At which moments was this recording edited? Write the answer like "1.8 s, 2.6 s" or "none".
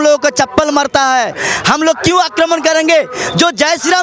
1.3 s